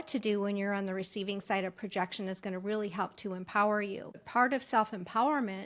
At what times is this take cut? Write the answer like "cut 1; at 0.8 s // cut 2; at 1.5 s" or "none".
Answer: cut 1; at 4.2 s